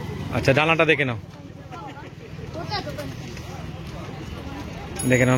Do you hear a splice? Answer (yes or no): no